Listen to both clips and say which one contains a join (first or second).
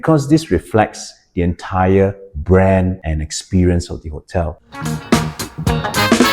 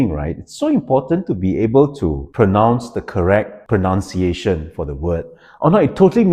first